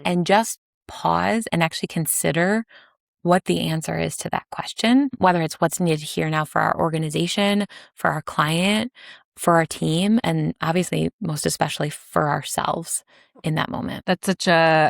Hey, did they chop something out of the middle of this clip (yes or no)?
yes